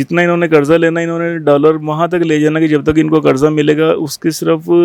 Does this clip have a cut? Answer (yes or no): no